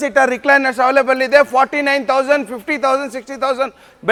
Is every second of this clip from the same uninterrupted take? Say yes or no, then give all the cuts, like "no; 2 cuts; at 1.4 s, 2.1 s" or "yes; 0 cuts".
yes; 0 cuts